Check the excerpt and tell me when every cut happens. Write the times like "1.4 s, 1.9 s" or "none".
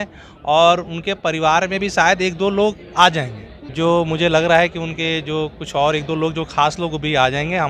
none